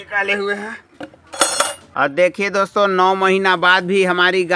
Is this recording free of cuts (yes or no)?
no